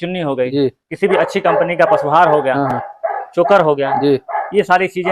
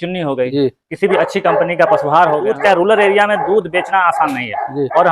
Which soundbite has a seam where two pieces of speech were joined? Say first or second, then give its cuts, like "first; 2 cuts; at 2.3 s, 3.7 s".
second; 1 cut; at 2.5 s